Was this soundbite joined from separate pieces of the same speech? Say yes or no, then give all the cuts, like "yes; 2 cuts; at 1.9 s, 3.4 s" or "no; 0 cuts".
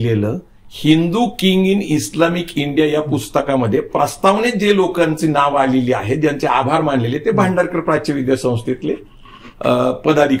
no; 0 cuts